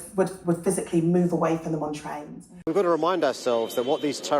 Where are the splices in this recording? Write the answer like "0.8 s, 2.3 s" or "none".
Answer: 2.7 s